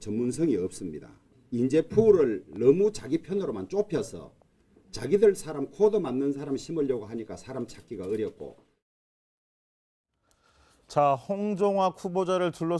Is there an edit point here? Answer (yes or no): yes